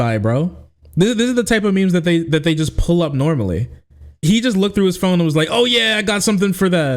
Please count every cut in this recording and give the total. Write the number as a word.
one